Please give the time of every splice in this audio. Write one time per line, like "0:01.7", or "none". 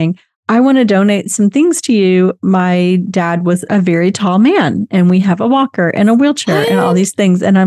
none